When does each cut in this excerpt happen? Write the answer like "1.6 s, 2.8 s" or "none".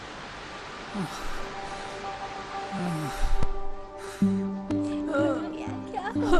none